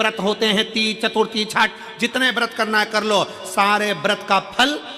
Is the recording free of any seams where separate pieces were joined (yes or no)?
yes